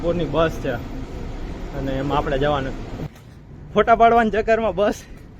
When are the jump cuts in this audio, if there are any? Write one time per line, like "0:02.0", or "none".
0:03.0